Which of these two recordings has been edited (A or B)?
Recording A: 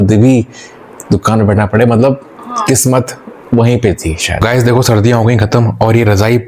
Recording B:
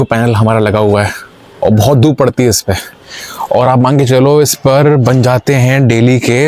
A